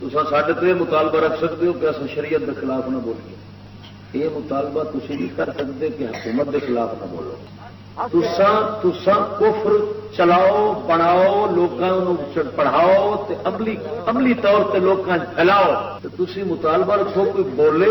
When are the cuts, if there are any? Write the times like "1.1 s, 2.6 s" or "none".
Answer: 16.0 s